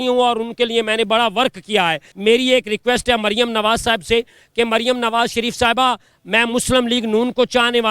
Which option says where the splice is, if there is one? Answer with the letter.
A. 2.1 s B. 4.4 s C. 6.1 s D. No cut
A